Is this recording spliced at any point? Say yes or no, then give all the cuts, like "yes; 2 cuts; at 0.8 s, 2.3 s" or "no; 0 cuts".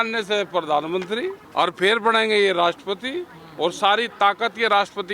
yes; 1 cut; at 1.4 s